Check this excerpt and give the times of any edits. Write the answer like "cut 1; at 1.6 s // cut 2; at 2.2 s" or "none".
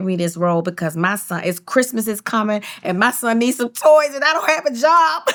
none